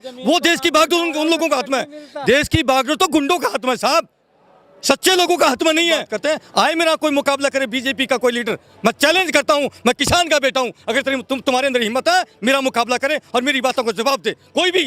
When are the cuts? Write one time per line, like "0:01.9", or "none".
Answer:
0:06.1